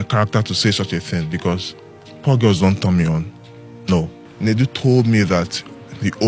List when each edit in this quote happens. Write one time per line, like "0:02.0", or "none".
0:04.2